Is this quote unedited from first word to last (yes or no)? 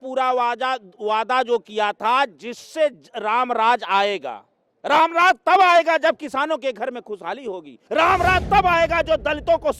no